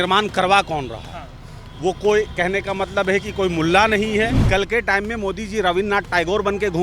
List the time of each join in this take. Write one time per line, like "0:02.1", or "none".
0:04.4